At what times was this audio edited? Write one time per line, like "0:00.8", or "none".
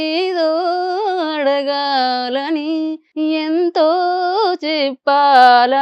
0:03.0